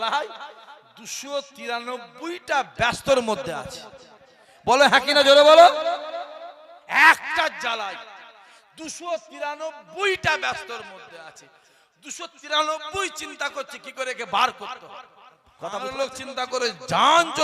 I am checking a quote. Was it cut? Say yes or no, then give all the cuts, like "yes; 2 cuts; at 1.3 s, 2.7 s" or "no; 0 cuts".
yes; 1 cut; at 15.8 s